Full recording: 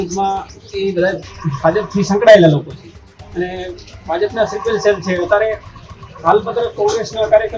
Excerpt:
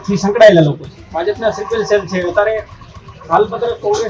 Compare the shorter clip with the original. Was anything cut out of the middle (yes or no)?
yes